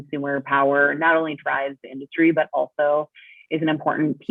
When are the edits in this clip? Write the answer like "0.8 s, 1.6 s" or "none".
none